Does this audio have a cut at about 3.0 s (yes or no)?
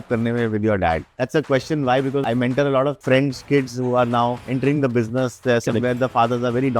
yes